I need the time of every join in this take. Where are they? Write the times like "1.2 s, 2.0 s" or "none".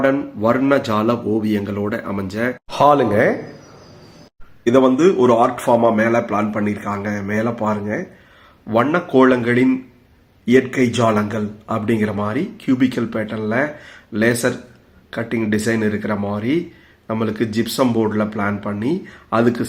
none